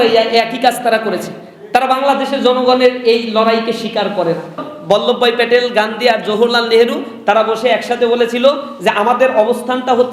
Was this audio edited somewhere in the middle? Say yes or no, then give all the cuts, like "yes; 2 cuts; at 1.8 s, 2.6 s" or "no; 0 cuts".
yes; 1 cut; at 4.6 s